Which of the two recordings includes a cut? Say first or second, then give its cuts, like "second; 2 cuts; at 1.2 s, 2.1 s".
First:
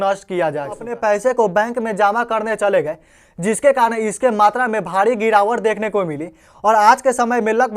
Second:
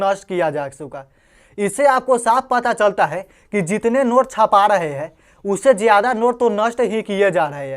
first; 1 cut; at 0.9 s